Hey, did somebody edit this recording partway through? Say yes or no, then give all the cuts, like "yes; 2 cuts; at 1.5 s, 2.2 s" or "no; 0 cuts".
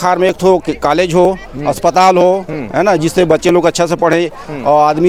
no; 0 cuts